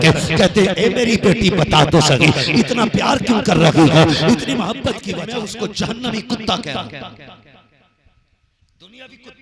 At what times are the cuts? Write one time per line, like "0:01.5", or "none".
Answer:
0:05.0